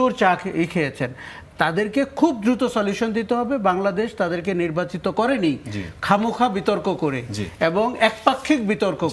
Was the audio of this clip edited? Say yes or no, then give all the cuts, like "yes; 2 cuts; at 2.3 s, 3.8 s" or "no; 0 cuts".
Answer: no; 0 cuts